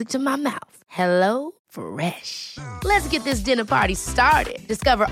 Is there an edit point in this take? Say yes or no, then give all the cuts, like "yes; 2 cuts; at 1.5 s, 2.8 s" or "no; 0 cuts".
no; 0 cuts